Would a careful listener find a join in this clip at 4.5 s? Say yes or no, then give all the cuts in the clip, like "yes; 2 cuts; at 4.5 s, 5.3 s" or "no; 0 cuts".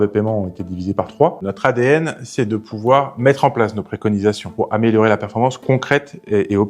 yes; 2 cuts; at 1.4 s, 4.5 s